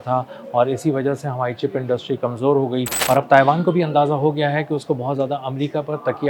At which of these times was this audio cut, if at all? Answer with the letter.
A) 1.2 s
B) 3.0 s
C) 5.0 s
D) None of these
B